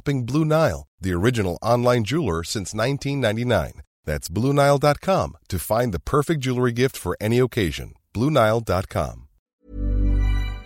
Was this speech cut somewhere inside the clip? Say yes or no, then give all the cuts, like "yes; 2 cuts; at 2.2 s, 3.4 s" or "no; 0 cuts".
yes; 1 cut; at 9.5 s